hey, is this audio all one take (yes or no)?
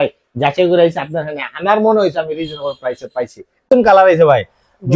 no